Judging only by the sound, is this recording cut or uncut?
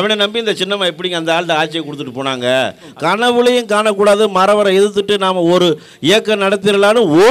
cut